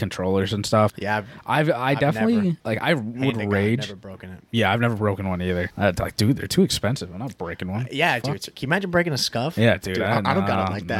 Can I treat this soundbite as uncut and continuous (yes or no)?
no